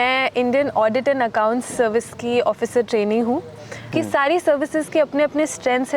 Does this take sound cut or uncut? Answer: cut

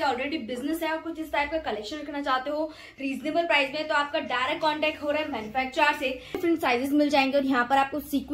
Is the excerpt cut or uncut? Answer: cut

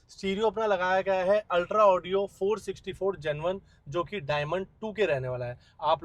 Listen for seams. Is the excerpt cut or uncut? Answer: uncut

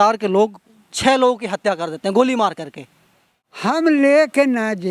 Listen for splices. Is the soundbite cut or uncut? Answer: cut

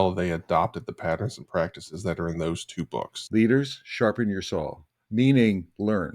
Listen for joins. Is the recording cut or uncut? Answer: cut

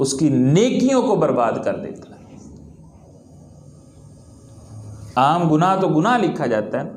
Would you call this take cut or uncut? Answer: uncut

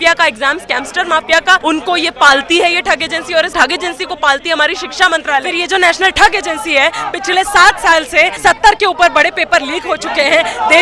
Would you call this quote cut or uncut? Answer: cut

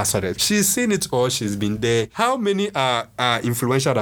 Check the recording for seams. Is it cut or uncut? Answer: cut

